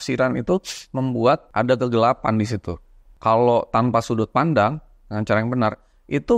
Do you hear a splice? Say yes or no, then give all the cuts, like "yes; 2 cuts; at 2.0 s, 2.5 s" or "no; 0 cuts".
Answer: yes; 1 cut; at 1.5 s